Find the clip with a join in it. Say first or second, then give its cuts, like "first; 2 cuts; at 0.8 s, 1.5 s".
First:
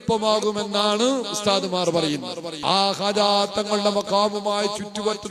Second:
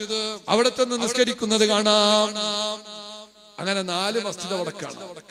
first; 1 cut; at 2.4 s